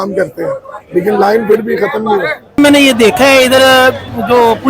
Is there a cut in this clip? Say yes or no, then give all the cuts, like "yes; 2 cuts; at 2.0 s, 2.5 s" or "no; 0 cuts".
yes; 1 cut; at 2.6 s